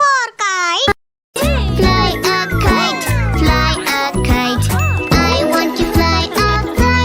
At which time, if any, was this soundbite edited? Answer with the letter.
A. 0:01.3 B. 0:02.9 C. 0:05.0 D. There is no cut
A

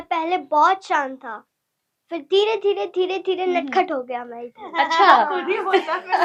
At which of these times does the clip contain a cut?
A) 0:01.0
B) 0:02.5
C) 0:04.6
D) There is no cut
D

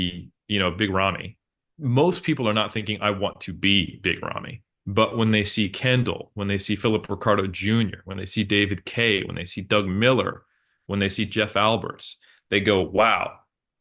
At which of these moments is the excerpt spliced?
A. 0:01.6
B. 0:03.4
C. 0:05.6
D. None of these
D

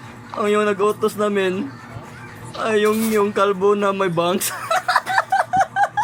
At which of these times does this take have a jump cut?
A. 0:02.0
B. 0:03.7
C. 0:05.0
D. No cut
D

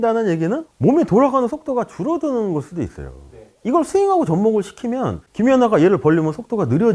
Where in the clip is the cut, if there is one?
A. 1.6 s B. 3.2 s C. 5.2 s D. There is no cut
C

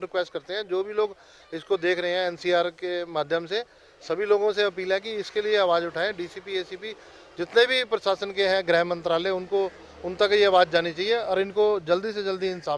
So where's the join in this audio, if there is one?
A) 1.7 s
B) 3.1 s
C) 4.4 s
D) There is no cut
D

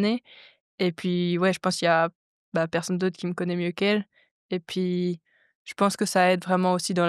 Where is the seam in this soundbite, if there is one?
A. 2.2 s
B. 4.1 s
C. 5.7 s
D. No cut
D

